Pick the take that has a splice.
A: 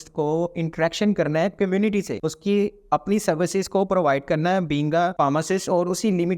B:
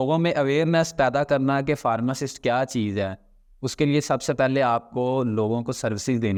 A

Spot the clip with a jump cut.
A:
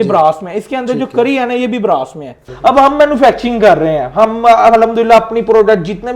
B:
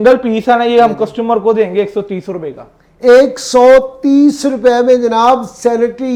A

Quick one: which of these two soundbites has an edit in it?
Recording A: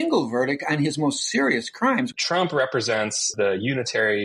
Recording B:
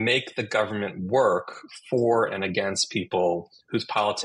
A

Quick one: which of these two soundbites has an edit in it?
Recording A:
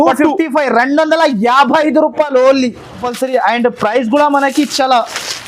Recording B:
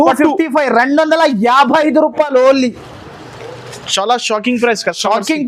A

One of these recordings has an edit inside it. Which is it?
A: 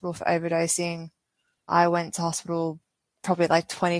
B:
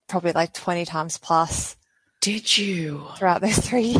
A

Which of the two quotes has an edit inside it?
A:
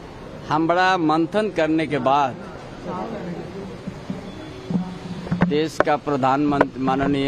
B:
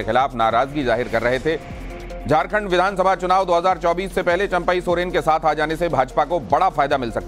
A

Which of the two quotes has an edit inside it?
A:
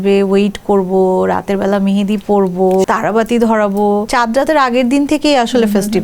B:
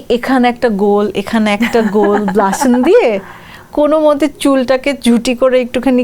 A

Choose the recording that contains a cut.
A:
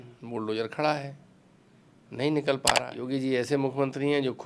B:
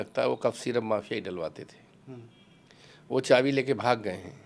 A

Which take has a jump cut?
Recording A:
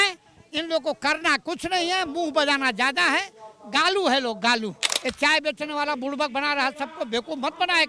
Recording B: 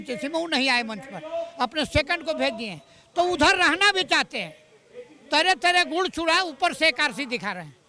A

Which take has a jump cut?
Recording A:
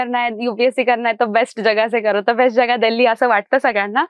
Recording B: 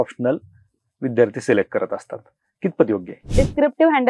B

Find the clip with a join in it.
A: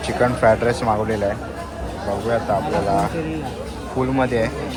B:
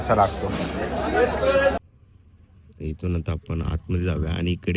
B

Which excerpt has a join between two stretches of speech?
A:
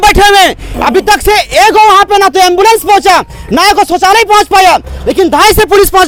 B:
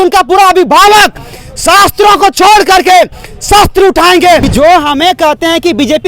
B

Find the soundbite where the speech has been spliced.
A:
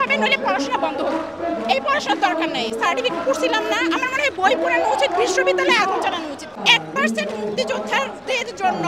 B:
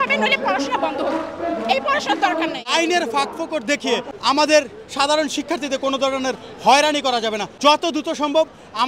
B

